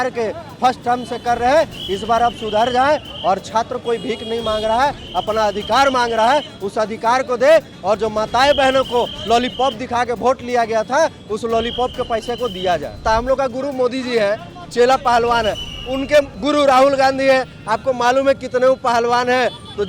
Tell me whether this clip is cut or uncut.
cut